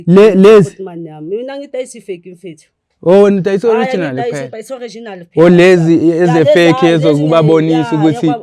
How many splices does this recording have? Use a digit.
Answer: 0